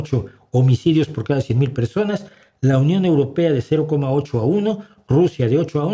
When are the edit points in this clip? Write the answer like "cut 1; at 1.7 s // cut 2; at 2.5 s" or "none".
none